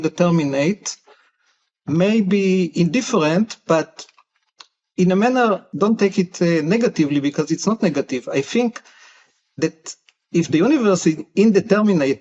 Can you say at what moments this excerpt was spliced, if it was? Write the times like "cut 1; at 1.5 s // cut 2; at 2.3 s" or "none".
cut 1; at 5.7 s

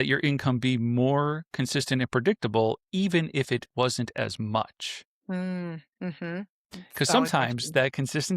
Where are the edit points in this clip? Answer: none

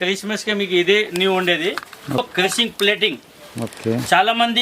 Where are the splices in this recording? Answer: cut 1; at 2.2 s

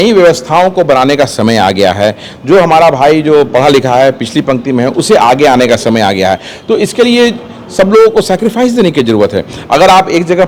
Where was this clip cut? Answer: none

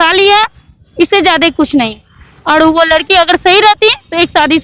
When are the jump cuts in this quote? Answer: none

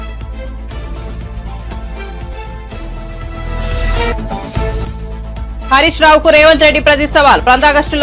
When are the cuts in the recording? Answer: cut 1; at 1.0 s

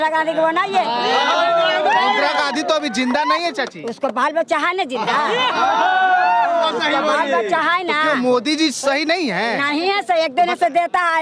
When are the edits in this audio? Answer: none

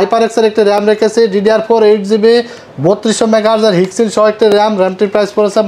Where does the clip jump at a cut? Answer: none

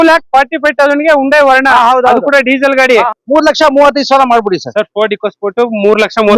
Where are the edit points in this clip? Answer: cut 1; at 3.1 s

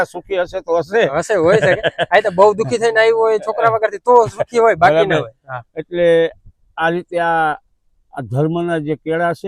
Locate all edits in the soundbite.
none

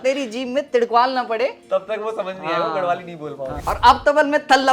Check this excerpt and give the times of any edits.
cut 1; at 3.6 s

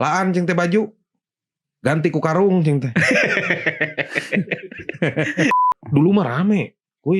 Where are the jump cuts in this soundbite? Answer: cut 1; at 5.5 s

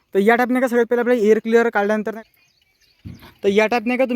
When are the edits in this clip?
cut 1; at 2.1 s

